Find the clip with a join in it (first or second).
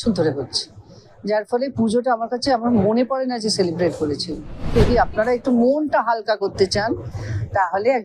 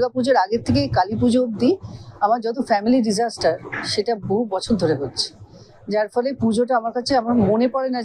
first